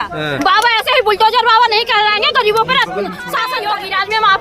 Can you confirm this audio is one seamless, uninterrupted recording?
no; 1 cut; at 3.3 s

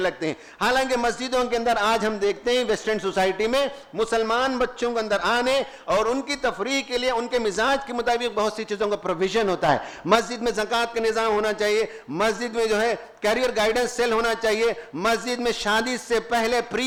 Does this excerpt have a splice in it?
no; 0 cuts

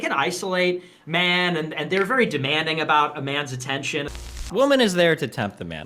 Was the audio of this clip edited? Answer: yes; 1 cut; at 4.1 s

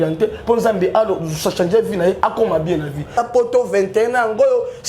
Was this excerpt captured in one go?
no; 1 cut; at 3.1 s

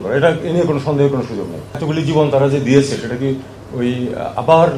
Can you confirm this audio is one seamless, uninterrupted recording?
no; 1 cut; at 1.8 s

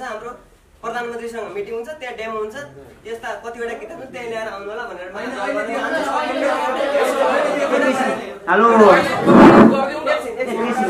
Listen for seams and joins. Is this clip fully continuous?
yes; 0 cuts

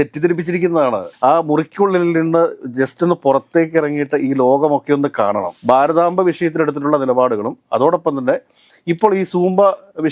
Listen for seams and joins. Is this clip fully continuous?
no; 2 cuts; at 1.1 s, 5.5 s

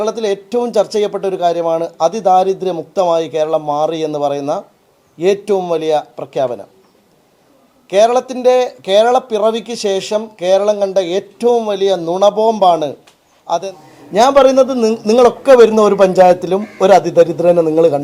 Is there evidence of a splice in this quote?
yes; 1 cut; at 13.6 s

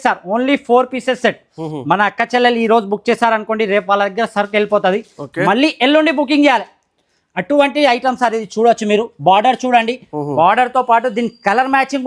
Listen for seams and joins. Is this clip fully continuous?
yes; 0 cuts

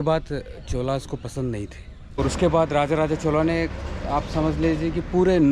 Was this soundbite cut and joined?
yes; 1 cut; at 2.2 s

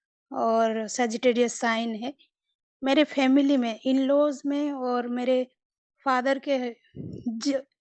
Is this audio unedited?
yes; 0 cuts

